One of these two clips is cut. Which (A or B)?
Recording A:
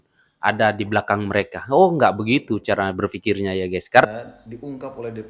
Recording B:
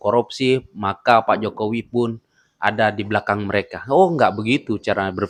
A